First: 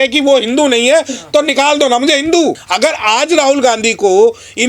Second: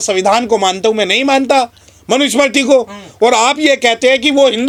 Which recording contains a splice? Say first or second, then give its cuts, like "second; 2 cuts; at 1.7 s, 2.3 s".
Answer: first; 1 cut; at 2.6 s